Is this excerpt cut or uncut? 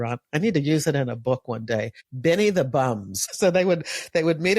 cut